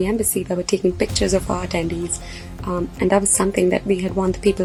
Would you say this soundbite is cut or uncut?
uncut